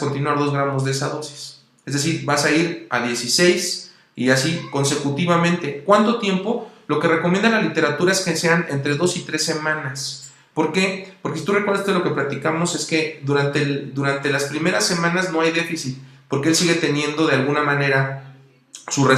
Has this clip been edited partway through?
no; 0 cuts

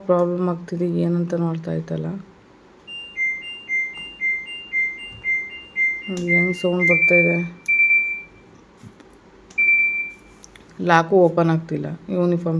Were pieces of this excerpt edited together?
no; 0 cuts

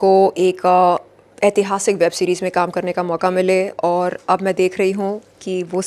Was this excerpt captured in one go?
yes; 0 cuts

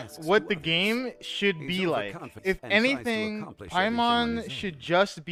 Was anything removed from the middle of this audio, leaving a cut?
no; 0 cuts

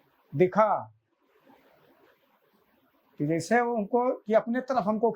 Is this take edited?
no; 0 cuts

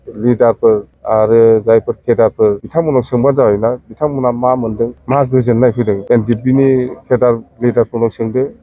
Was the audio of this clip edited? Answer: yes; 4 cuts; at 0.9 s, 2.6 s, 5.0 s, 6.0 s

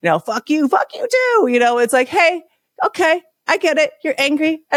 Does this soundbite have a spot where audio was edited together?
no; 0 cuts

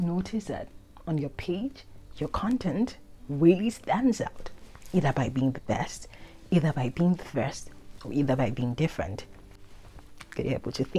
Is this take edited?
yes; 1 cut; at 9.6 s

